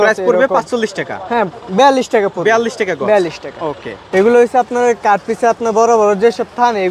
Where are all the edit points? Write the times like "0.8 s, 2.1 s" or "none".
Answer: none